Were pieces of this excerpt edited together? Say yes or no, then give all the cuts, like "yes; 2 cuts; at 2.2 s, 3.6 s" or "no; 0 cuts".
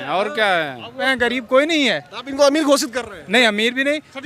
yes; 1 cut; at 1.1 s